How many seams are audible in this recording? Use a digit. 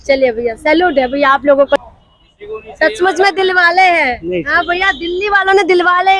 1